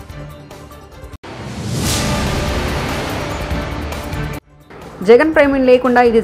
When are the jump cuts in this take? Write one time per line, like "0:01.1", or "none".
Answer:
0:01.2
0:04.4

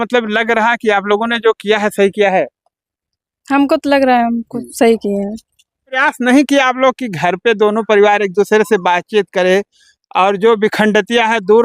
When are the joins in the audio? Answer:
0:05.9

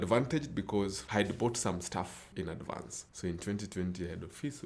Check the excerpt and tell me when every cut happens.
0:01.0

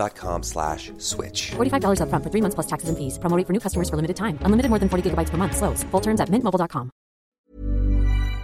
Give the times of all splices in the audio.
0:07.3

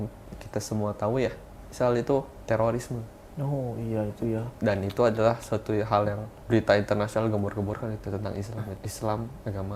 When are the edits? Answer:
0:02.3
0:06.3
0:08.8

